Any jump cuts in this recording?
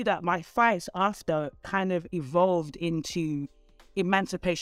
no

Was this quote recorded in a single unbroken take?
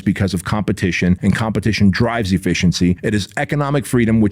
no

